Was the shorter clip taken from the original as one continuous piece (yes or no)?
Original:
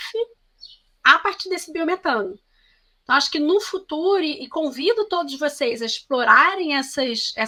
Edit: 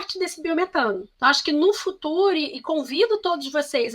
no